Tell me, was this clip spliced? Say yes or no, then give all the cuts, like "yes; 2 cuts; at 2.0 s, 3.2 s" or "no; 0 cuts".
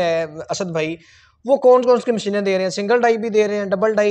no; 0 cuts